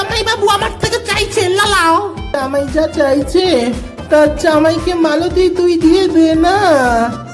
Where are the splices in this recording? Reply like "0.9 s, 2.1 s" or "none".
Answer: 2.3 s